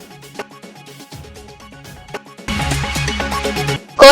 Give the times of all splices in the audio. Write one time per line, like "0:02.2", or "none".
0:02.4